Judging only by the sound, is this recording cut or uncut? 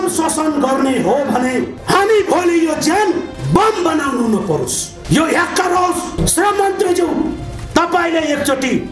cut